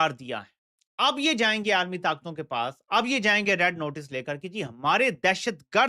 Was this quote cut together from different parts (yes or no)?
no